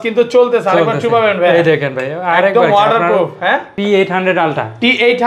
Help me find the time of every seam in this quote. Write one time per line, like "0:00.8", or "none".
0:03.8